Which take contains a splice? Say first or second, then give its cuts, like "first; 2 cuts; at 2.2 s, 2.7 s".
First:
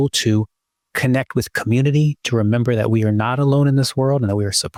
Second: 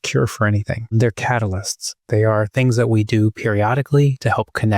second; 1 cut; at 0.9 s